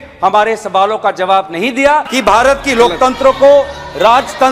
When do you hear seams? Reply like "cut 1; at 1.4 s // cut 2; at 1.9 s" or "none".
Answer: cut 1; at 2.1 s